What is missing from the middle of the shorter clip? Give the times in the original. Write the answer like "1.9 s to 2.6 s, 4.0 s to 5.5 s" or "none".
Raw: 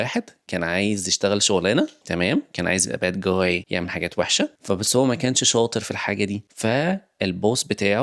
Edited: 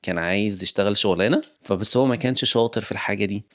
2.0 s to 4.6 s